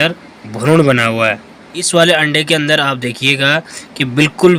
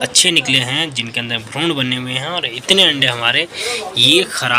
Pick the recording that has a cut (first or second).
first